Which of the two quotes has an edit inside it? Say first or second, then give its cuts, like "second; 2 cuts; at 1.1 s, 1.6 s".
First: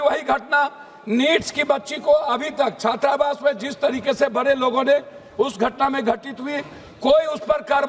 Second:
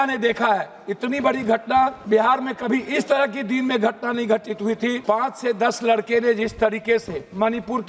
second; 2 cuts; at 2.0 s, 5.0 s